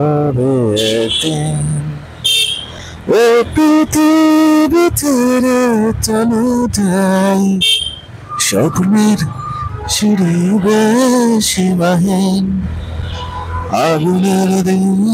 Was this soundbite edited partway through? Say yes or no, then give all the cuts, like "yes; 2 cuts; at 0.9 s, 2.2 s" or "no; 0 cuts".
no; 0 cuts